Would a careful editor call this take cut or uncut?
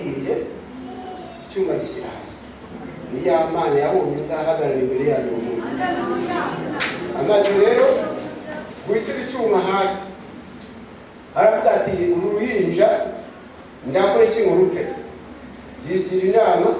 uncut